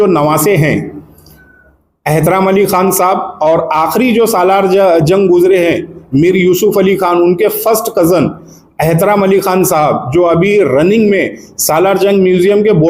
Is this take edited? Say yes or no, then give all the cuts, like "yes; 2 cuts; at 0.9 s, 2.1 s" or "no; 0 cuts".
no; 0 cuts